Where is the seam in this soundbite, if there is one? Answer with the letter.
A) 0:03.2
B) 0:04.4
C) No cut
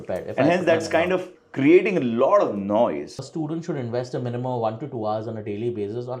A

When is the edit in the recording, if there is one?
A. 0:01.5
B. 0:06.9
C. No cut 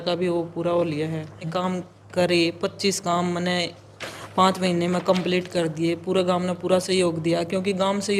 A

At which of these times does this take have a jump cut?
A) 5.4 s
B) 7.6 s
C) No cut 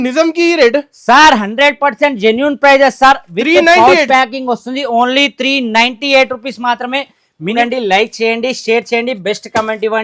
B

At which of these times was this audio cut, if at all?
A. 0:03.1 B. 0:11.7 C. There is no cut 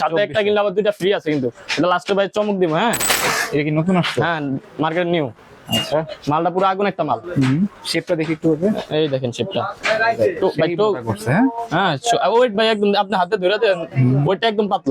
A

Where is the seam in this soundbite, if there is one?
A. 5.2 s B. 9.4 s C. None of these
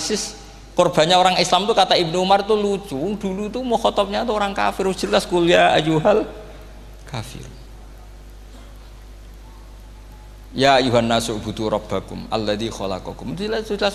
C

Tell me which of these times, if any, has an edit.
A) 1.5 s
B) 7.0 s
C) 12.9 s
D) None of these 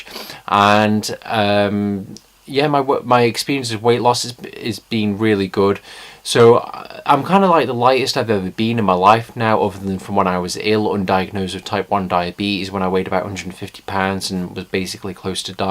C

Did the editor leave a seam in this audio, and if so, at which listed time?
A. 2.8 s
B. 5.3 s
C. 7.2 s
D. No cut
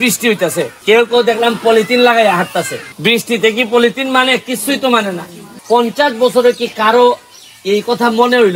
A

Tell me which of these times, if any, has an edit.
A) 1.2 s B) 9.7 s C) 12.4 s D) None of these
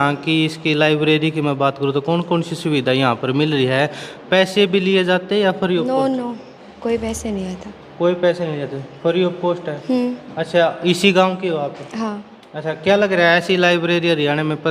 D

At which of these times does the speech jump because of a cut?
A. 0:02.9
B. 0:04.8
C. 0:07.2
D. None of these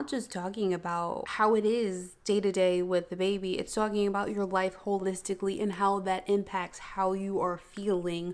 D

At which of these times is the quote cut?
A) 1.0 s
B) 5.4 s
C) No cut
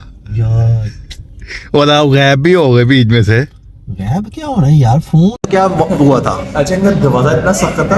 B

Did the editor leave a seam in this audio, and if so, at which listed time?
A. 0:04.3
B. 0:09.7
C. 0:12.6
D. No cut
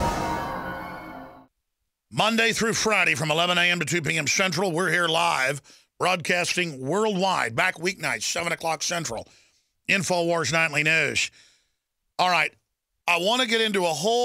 D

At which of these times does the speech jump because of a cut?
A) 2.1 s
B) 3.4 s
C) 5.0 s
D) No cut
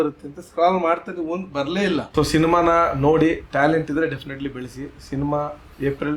A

